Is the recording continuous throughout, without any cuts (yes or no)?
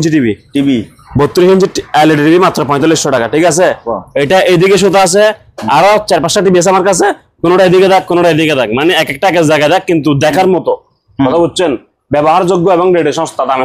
yes